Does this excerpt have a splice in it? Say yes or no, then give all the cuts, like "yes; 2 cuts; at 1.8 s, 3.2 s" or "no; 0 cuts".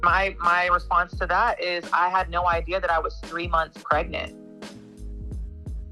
no; 0 cuts